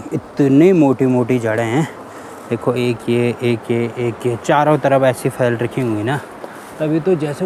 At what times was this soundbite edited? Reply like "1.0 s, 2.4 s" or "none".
none